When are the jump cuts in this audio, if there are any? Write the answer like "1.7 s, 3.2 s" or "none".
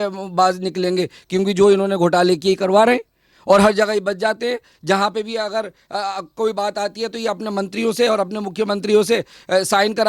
none